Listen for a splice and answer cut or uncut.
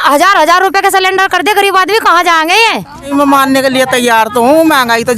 cut